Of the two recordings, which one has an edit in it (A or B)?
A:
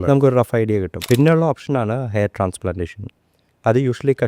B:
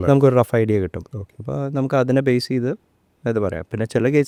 A